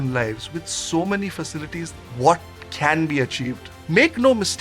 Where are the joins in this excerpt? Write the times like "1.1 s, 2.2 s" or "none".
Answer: 2.0 s, 3.7 s